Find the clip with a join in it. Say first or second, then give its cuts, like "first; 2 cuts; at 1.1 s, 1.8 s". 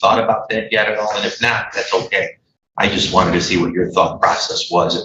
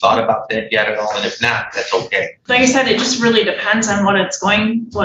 second; 1 cut; at 2.4 s